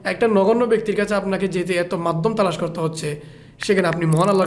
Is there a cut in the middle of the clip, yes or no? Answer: no